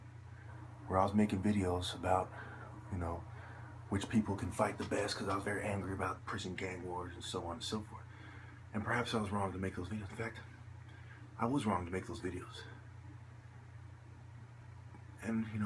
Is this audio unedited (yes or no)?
no